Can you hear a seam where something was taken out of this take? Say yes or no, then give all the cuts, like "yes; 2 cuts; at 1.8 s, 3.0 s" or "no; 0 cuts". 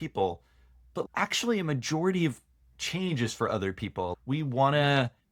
yes; 2 cuts; at 1.0 s, 4.1 s